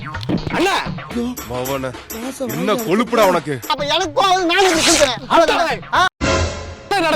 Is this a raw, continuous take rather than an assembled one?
no; 1 cut; at 3.7 s

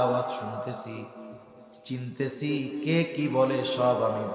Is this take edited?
no; 0 cuts

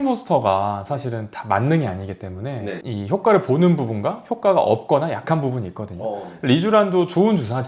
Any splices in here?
no; 0 cuts

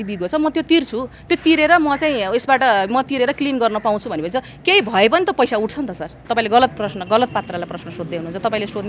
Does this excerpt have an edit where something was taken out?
yes; 1 cut; at 6.2 s

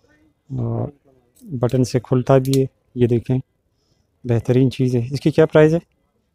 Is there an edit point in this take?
no; 0 cuts

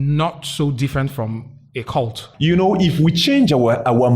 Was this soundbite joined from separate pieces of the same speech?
yes; 1 cut; at 2.3 s

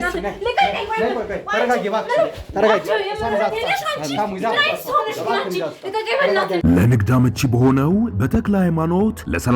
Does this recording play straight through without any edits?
no; 1 cut; at 6.6 s

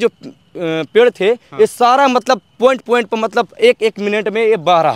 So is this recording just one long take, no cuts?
yes; 0 cuts

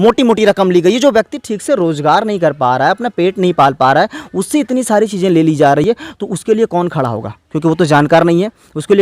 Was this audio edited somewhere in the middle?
no; 0 cuts

